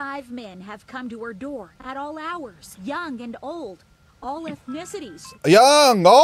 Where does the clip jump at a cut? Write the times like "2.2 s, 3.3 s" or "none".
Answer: 2.6 s, 5.2 s